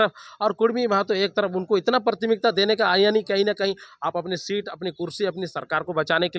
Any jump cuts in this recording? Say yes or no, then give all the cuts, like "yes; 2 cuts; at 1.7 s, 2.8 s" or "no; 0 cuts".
no; 0 cuts